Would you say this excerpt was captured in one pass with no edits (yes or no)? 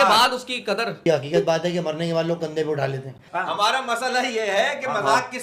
no